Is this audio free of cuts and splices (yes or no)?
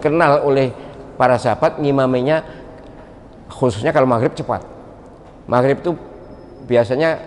yes